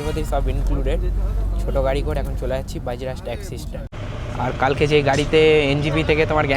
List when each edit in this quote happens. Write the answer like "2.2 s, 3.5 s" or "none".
3.8 s